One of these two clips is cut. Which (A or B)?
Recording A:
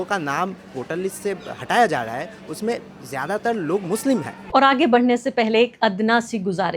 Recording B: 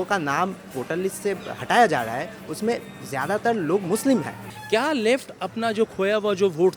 B